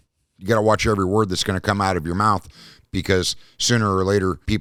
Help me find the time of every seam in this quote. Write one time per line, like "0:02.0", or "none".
none